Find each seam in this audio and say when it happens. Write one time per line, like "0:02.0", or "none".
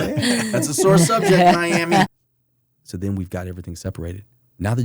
0:02.1